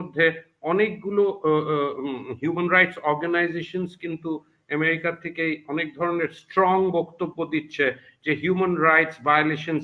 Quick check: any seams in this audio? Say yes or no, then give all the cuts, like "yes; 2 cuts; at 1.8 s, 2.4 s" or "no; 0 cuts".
no; 0 cuts